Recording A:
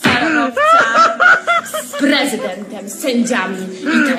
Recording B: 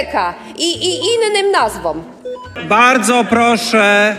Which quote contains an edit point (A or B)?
B